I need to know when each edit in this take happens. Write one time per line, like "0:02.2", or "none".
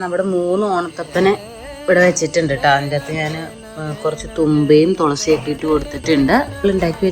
none